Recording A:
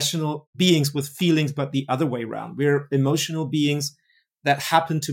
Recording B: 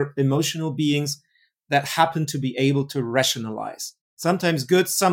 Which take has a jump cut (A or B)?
B